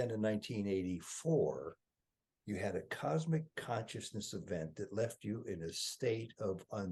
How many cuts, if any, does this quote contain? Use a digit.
0